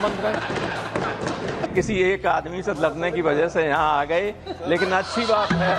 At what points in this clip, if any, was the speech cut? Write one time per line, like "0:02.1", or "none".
0:01.7